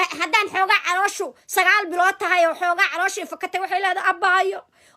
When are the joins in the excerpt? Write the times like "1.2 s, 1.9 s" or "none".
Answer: none